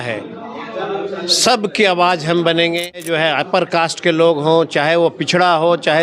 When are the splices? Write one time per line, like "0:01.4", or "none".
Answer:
0:03.4